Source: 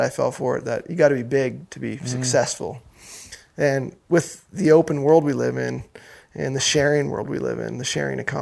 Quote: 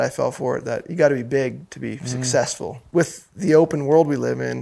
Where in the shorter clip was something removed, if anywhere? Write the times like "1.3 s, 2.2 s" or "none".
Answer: 2.8 s